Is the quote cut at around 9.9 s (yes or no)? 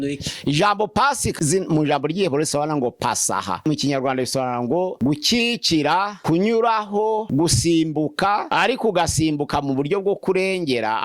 no